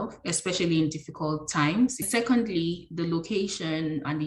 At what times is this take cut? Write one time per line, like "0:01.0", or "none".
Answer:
0:02.1